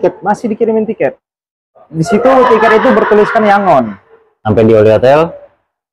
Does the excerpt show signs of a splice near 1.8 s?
no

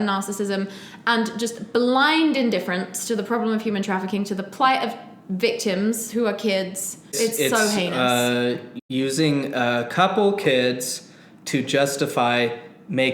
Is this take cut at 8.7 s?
yes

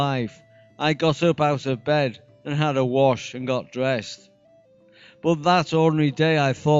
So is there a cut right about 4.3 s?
no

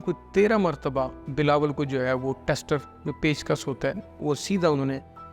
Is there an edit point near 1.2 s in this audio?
yes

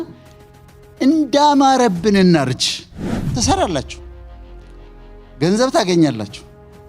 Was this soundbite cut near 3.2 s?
yes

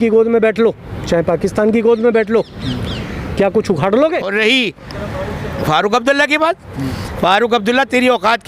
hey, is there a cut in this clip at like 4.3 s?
yes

